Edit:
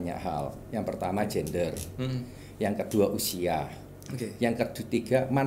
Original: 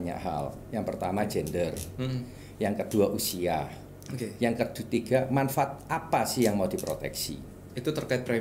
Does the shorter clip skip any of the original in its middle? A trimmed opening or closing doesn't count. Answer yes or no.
no